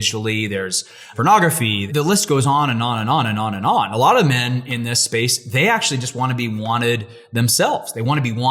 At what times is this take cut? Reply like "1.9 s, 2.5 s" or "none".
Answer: 1.1 s, 1.9 s